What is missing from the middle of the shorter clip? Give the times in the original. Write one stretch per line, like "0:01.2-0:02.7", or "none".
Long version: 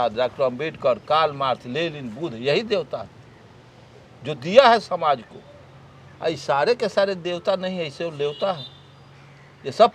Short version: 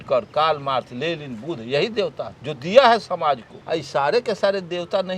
0:03.1-0:04.2
0:05.3-0:06.1